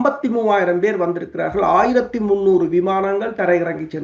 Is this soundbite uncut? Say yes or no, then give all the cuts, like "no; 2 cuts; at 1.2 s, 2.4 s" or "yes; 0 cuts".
yes; 0 cuts